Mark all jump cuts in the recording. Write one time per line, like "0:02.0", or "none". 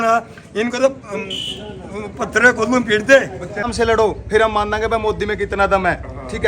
0:03.7